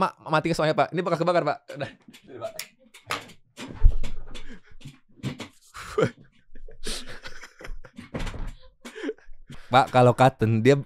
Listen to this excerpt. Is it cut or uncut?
cut